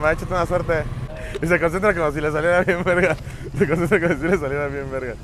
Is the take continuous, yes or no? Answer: yes